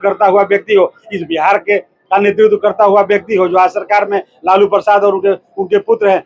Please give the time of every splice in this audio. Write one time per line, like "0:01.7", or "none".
none